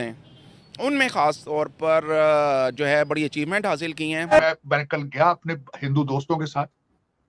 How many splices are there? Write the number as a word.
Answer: one